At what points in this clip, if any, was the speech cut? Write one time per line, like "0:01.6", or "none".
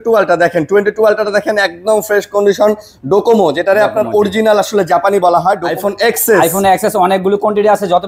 0:05.7